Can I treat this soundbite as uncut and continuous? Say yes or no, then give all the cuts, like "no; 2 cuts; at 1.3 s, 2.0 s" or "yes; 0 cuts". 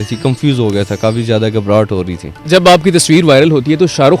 no; 1 cut; at 2.5 s